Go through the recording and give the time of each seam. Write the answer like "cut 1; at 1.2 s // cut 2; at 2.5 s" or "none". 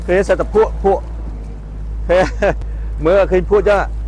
none

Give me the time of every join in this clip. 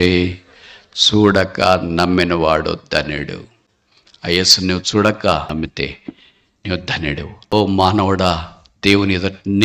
cut 1; at 7.3 s

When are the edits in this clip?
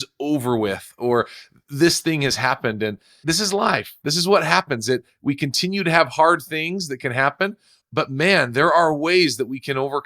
cut 1; at 3.1 s

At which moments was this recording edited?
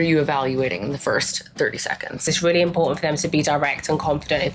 cut 1; at 2.3 s

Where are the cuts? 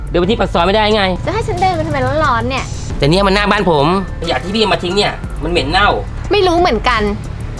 cut 1; at 1.2 s // cut 2; at 2.7 s // cut 3; at 4.1 s // cut 4; at 6.1 s

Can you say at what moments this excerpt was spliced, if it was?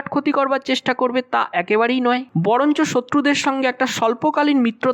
none

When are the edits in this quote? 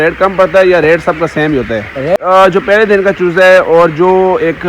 cut 1; at 2.2 s

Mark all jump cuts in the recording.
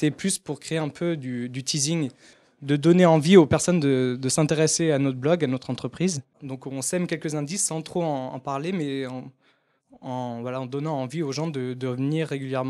cut 1; at 4.1 s

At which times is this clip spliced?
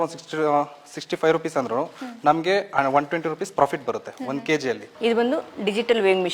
cut 1; at 4.9 s

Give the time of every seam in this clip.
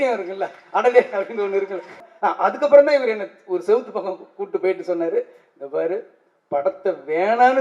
cut 1; at 1.9 s

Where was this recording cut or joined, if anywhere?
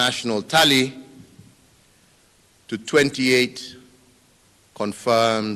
none

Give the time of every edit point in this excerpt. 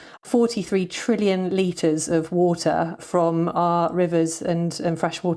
none

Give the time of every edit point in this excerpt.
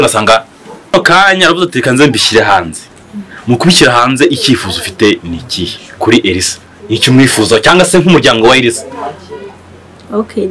cut 1; at 0.9 s

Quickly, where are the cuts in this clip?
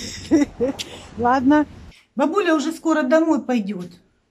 cut 1; at 1.8 s

